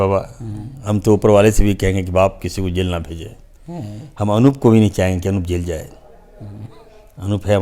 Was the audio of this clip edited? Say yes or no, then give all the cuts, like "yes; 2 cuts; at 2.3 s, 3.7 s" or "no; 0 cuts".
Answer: no; 0 cuts